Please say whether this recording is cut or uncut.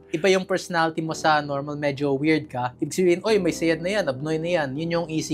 uncut